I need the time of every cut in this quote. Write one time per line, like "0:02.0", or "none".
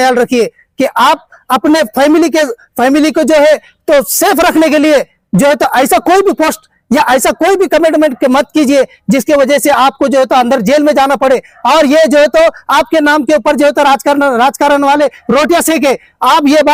none

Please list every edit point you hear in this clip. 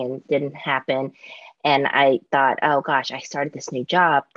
none

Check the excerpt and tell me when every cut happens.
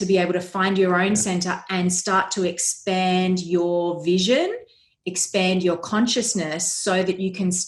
none

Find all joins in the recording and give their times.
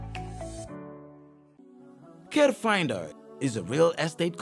0:01.6

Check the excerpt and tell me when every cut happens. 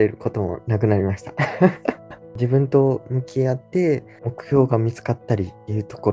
0:02.3
0:04.2

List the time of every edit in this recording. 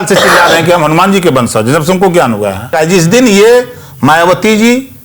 0:02.7

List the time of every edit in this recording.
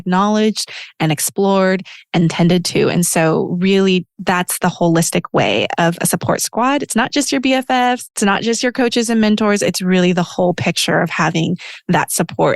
0:08.1

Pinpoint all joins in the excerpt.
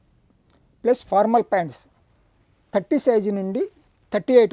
none

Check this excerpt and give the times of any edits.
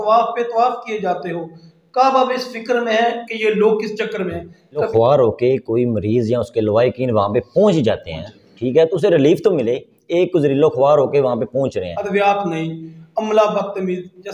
0:04.9
0:11.9

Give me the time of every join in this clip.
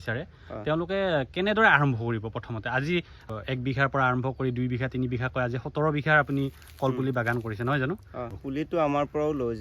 0:03.2
0:08.3

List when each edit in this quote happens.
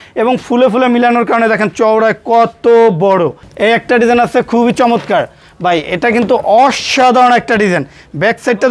0:03.4

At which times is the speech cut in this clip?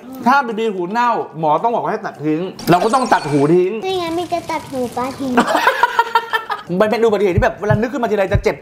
0:02.5
0:05.4
0:06.6

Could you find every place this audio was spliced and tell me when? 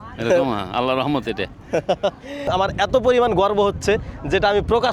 none

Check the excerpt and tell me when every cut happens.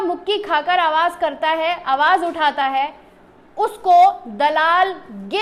none

